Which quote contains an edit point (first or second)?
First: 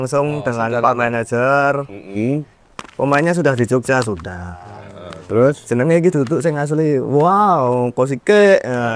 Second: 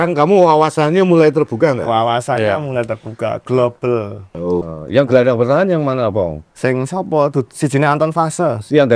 second